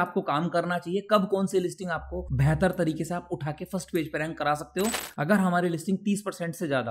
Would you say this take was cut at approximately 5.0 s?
yes; 1 cut; at 5.0 s

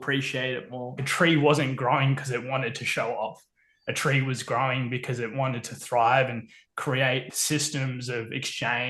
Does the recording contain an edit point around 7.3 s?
yes; 2 cuts; at 1.0 s, 7.3 s

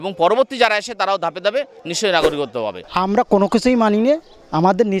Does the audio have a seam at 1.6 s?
no; 1 cut; at 2.8 s

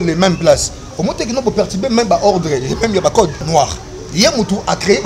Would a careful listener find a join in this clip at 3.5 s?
yes; 1 cut; at 3.5 s

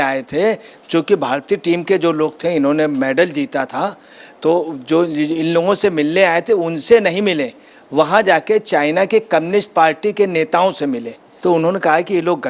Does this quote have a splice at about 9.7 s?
no; 1 cut; at 11.3 s

